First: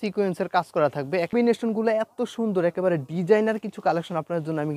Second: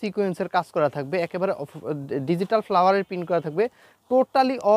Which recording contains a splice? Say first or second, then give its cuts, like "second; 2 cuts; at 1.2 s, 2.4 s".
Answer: first; 1 cut; at 1.3 s